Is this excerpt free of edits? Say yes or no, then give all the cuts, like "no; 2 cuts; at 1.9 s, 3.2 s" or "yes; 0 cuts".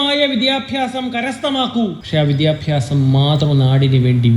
no; 1 cut; at 2.0 s